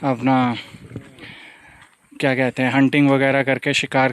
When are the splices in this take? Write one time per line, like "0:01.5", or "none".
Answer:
none